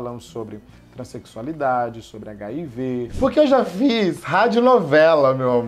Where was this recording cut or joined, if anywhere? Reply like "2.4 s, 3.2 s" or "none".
3.1 s